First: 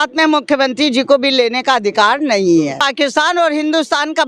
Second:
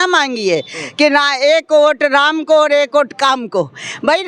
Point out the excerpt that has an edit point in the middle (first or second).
first